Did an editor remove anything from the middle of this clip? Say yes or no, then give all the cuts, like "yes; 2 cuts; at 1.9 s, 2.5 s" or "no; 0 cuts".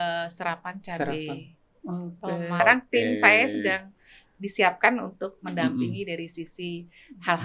yes; 1 cut; at 2.6 s